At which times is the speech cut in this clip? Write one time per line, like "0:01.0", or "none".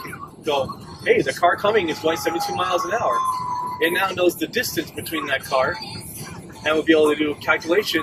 none